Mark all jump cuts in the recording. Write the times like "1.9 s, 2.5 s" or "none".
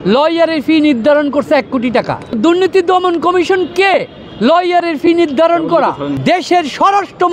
2.4 s, 6.1 s